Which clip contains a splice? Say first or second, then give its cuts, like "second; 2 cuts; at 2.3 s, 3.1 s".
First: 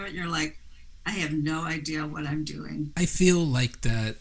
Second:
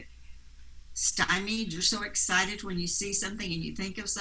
first; 1 cut; at 2.9 s